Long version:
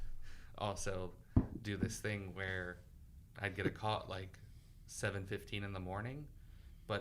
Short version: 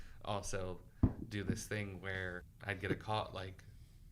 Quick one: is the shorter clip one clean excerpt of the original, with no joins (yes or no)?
no